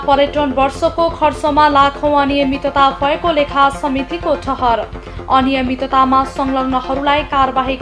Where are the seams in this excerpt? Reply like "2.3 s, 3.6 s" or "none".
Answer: none